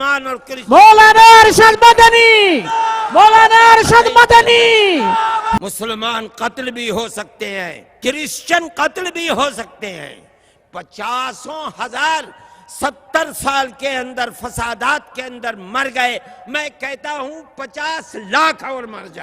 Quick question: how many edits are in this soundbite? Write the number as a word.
one